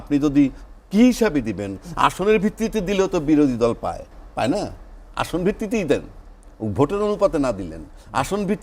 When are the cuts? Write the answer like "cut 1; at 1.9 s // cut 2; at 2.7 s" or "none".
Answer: cut 1; at 4.2 s